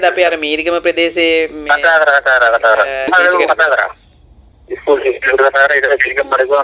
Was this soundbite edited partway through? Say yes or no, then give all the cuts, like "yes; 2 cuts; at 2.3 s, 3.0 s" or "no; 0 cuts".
yes; 1 cut; at 3.1 s